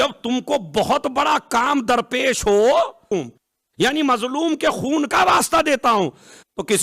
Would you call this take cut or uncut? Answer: cut